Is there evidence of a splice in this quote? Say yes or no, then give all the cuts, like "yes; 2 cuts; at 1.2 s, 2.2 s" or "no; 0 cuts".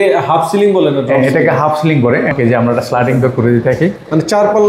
yes; 1 cut; at 2.3 s